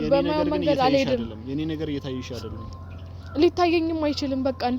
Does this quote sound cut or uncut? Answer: uncut